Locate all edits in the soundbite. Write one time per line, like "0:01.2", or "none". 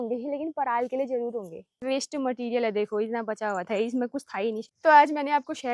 0:01.7
0:04.7